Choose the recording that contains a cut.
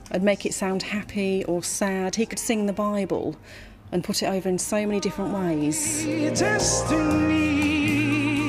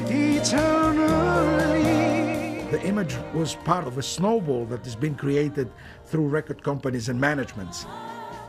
first; 1 cut; at 2.5 s

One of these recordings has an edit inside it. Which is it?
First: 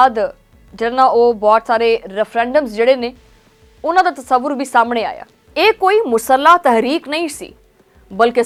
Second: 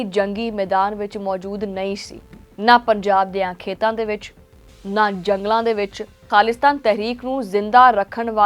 second; 1 cut; at 6.3 s

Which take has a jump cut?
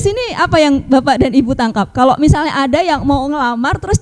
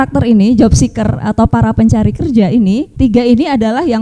second; 1 cut; at 2.9 s

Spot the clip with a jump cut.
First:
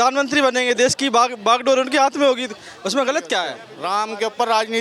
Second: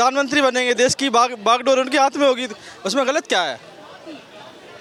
first; 1 cut; at 3.7 s

